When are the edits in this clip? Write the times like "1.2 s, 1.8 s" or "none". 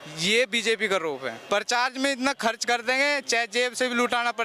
1.3 s

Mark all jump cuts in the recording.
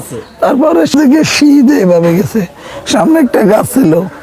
0.9 s

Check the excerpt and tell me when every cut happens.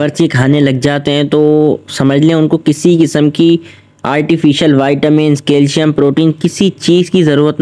none

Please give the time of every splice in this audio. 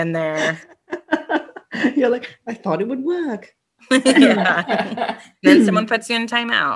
none

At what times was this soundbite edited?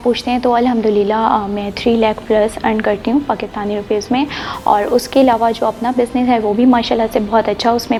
none

